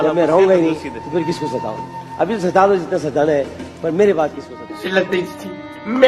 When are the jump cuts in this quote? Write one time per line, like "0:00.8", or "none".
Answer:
0:04.5